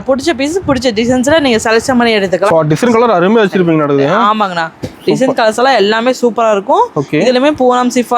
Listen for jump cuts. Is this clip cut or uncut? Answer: cut